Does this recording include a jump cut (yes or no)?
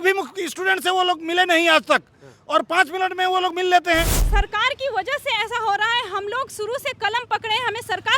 yes